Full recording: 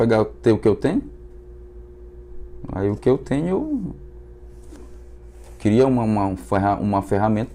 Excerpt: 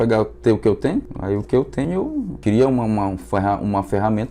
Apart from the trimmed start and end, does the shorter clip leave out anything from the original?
yes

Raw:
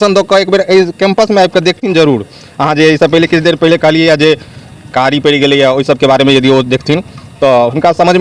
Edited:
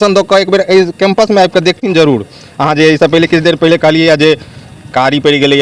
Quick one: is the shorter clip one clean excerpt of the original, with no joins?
yes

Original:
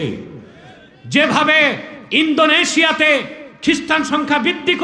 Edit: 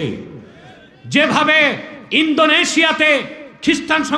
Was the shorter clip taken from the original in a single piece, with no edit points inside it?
yes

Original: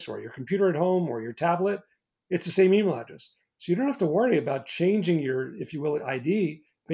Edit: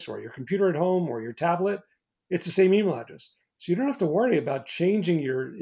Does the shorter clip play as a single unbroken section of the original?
yes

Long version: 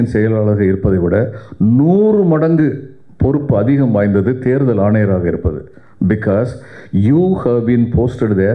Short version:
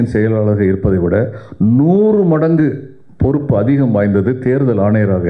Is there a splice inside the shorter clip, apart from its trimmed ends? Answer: no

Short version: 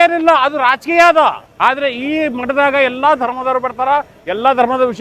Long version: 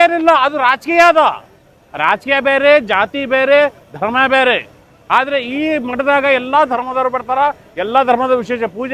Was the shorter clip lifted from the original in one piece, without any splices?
no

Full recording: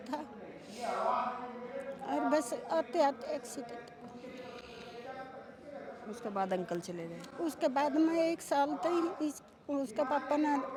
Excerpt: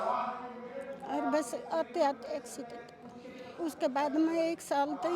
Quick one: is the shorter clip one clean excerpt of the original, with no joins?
no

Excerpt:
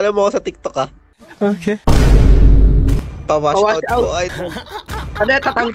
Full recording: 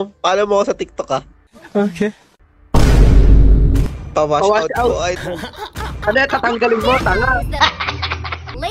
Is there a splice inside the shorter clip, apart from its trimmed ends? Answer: yes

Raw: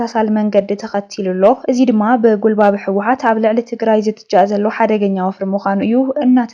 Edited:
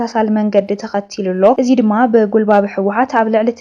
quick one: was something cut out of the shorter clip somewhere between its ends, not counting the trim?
yes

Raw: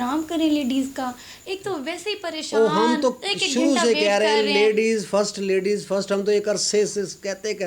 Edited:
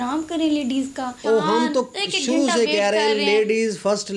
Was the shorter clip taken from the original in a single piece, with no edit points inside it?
no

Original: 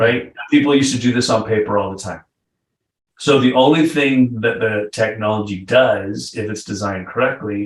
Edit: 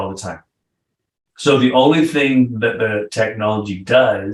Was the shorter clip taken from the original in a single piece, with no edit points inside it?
yes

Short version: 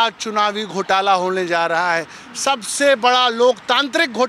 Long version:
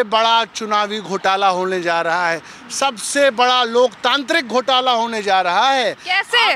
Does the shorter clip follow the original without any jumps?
yes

